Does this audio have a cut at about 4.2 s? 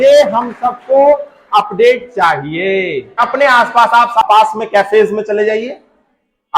yes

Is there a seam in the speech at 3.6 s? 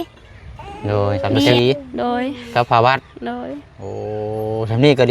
no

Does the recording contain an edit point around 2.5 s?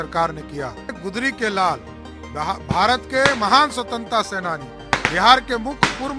no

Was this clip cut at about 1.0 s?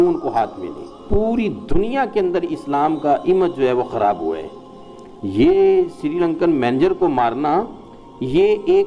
yes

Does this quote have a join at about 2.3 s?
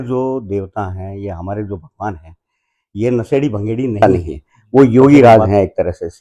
no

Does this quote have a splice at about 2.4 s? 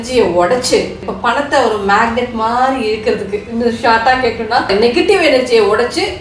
no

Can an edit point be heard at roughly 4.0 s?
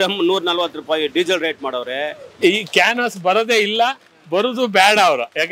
no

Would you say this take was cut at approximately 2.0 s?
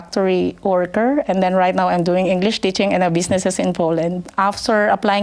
no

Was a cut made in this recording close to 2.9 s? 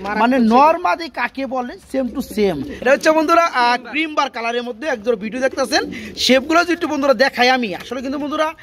yes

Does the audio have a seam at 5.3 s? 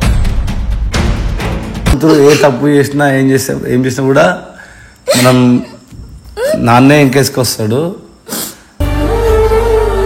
no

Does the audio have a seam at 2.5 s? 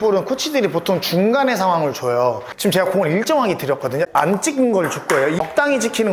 yes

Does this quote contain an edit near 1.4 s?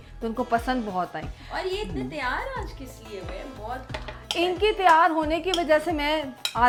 no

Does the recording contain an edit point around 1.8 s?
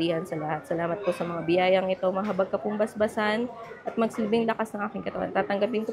no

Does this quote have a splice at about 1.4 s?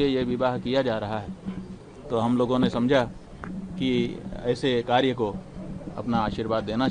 no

